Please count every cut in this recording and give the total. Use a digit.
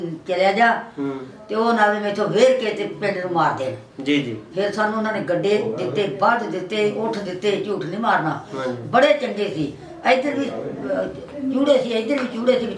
0